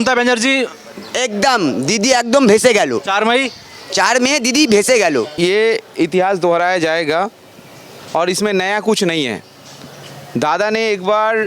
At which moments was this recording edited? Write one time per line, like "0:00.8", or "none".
0:05.3